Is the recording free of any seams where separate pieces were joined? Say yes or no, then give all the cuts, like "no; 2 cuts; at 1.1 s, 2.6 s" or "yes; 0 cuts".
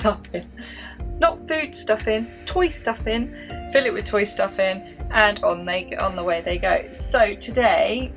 yes; 0 cuts